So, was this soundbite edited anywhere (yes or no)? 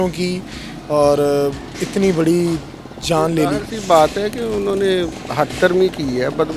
no